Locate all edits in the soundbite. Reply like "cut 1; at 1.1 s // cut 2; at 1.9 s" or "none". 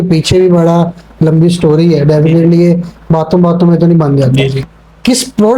cut 1; at 4.6 s